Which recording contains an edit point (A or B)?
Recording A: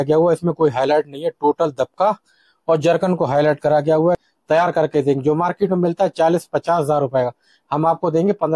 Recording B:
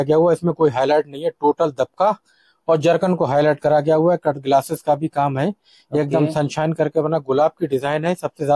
A